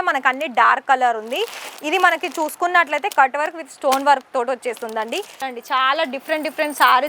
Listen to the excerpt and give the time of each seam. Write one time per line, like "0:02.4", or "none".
0:05.5